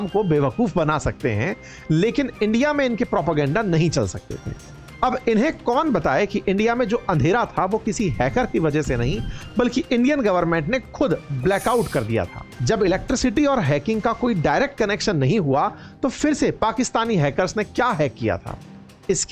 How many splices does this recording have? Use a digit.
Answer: 0